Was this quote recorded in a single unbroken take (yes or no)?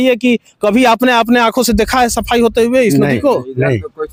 yes